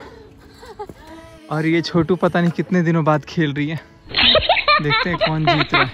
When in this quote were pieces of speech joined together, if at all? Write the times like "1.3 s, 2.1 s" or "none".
none